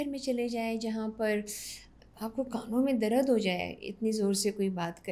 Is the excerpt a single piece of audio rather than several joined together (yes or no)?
yes